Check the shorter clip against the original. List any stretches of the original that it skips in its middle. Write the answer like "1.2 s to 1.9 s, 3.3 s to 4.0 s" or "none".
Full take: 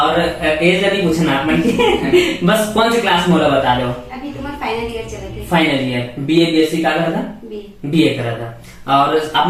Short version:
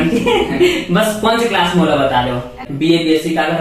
4.2 s to 6.1 s